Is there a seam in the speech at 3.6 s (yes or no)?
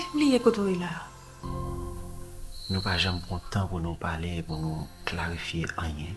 no